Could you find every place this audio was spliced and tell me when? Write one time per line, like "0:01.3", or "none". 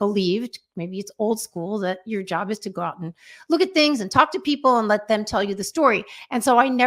none

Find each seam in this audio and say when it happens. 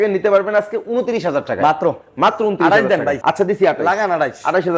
0:03.2

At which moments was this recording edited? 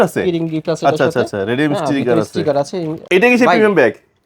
0:03.0

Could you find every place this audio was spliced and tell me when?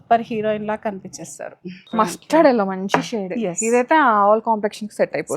0:01.9

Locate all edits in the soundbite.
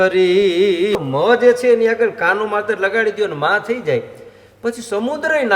0:01.0

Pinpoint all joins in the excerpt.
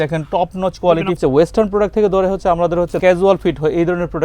0:01.2
0:03.0

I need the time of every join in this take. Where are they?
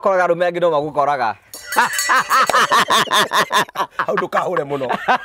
none

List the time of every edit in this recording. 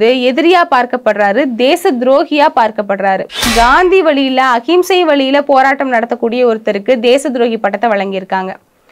0:03.5

